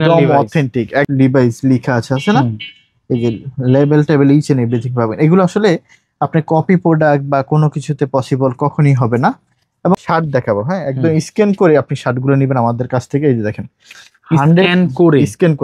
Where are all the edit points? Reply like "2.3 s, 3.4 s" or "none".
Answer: 1.1 s, 9.9 s